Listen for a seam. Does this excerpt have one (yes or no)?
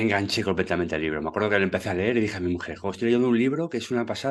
no